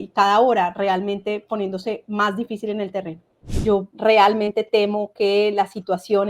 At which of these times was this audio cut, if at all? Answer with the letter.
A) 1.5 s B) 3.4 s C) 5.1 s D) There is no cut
B